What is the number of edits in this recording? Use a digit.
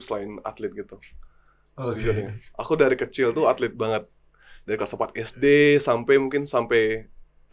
0